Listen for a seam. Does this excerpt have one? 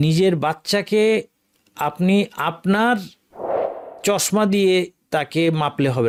no; 0 cuts

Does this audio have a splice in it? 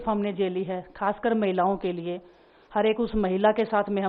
no; 0 cuts

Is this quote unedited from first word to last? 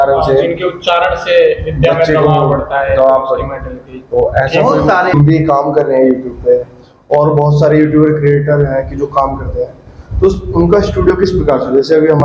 no; 1 cut; at 5.1 s

